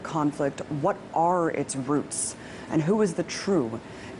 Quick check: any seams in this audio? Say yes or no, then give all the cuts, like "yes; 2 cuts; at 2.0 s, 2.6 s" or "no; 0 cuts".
no; 0 cuts